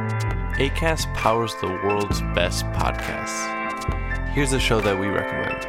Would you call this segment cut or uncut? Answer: uncut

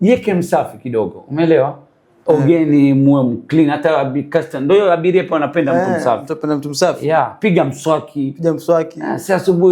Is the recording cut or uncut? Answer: uncut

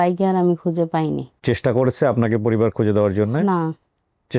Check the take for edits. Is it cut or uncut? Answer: cut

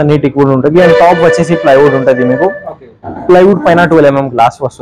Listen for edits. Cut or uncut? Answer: uncut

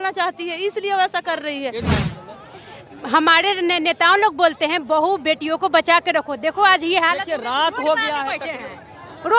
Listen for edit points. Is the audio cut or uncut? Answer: cut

